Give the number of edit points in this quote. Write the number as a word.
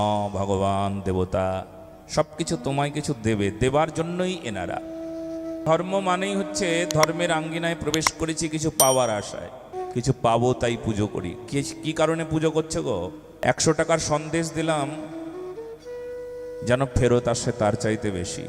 three